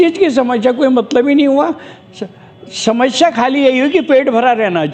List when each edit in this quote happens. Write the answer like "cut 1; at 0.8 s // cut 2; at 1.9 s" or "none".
none